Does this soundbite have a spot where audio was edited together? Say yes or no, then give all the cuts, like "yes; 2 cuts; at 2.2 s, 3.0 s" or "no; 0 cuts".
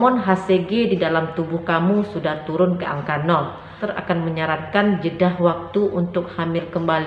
yes; 1 cut; at 3.9 s